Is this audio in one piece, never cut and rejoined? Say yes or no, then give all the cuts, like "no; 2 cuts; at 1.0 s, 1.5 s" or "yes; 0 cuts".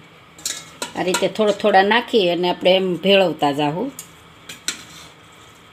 yes; 0 cuts